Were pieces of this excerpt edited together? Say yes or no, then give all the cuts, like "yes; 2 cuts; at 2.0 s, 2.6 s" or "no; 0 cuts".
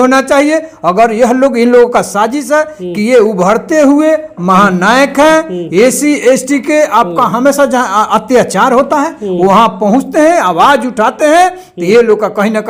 no; 0 cuts